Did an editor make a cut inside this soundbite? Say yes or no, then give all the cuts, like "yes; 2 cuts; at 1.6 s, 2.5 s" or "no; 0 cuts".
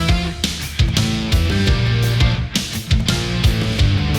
no; 0 cuts